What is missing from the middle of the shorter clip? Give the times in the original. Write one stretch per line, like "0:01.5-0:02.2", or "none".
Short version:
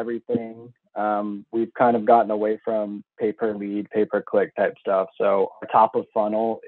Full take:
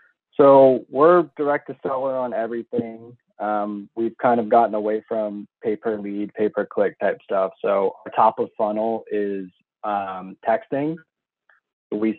none